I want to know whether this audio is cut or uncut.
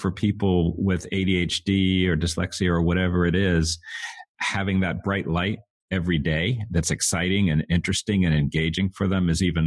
uncut